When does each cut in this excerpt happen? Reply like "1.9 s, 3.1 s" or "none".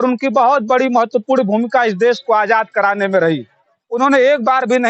3.8 s